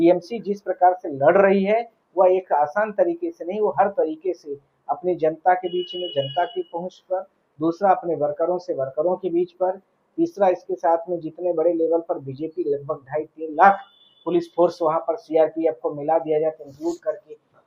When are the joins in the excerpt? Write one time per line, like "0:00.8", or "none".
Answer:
none